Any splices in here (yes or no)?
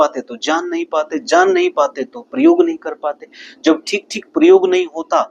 no